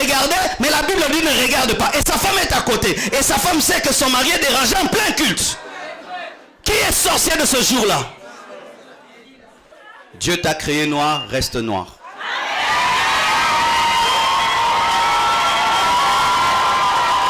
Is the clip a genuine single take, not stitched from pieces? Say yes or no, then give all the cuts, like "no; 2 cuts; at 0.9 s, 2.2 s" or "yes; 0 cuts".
no; 1 cut; at 9.7 s